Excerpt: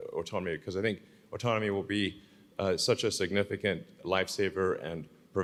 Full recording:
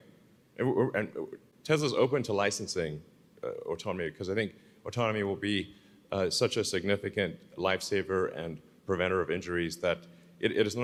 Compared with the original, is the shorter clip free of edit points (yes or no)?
yes